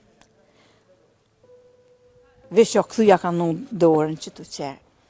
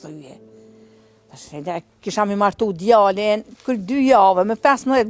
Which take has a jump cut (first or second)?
first